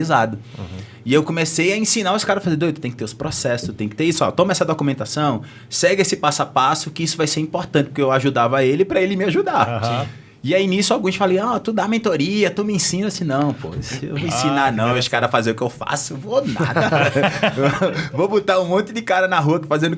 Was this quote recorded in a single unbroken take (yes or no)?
yes